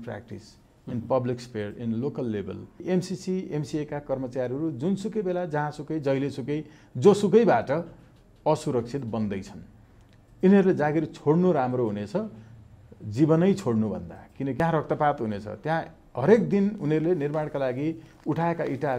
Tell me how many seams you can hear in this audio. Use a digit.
2